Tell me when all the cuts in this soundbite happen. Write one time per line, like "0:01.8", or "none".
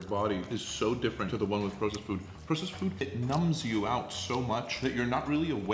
0:03.0